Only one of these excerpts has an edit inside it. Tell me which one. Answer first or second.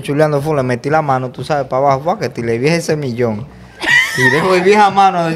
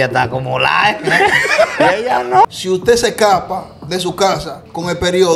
second